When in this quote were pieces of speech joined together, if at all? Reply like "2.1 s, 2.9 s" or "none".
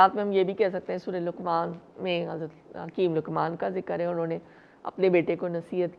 none